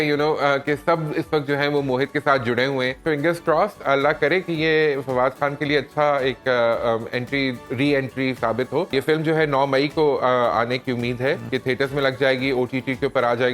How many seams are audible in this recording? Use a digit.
3